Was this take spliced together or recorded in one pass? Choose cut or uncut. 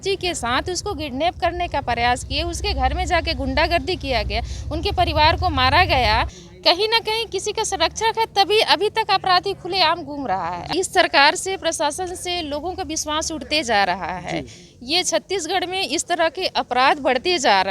cut